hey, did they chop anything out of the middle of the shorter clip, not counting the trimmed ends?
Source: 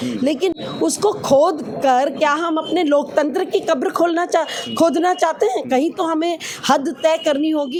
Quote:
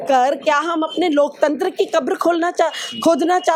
no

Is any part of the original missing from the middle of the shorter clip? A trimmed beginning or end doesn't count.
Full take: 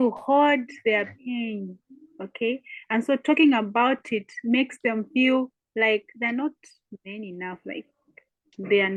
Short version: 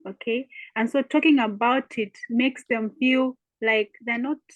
no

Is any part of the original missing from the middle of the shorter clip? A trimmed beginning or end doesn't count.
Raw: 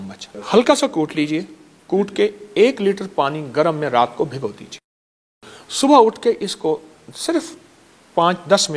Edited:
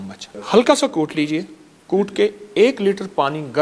no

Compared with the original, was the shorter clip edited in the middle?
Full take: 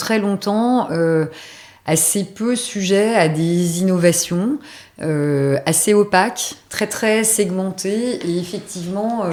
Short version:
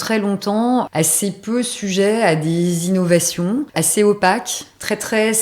yes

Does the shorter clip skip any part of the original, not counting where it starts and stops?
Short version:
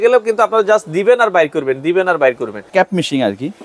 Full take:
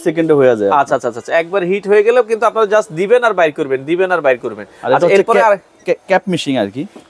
yes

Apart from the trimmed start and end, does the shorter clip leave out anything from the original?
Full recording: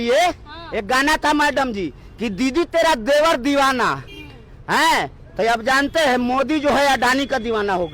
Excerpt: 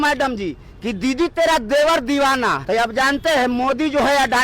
yes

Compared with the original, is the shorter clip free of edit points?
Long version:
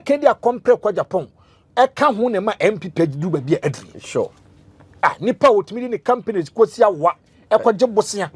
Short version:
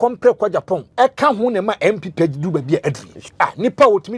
no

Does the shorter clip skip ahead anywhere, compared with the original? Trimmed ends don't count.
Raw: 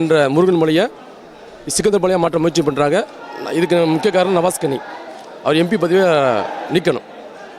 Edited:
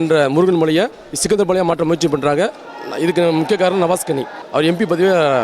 yes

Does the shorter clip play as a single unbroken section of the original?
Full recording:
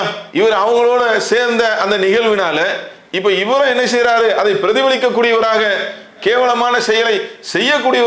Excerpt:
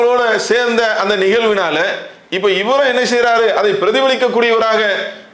yes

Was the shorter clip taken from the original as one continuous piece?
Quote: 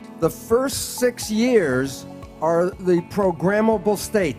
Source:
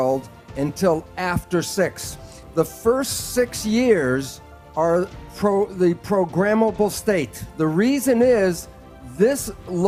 no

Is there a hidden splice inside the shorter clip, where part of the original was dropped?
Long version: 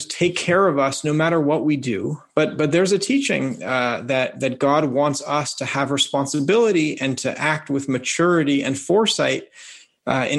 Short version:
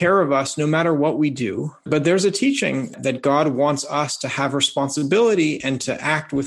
yes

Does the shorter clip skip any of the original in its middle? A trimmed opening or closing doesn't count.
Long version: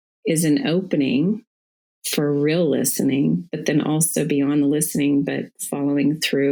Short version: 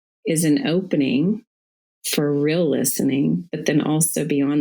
no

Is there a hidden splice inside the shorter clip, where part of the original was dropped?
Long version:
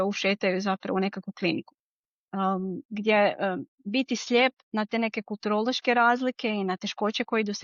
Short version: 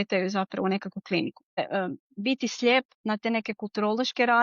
yes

